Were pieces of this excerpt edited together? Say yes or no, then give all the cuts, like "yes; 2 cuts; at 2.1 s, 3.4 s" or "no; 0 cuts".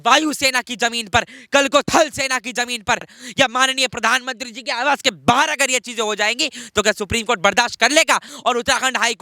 yes; 2 cuts; at 3.2 s, 8.3 s